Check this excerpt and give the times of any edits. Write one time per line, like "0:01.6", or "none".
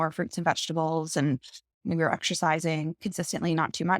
0:01.8
0:03.0